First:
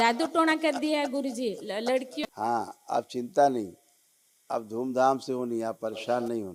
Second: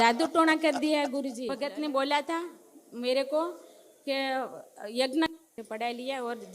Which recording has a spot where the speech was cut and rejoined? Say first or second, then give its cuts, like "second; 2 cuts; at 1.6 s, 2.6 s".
second; 1 cut; at 1.4 s